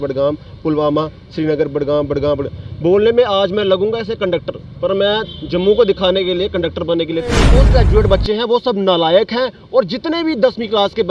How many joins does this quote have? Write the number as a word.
one